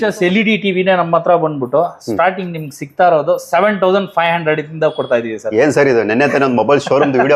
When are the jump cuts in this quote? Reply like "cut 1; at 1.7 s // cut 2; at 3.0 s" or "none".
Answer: none